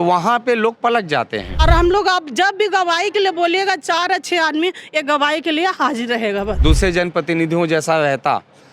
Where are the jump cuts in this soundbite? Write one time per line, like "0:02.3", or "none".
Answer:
0:01.4
0:06.6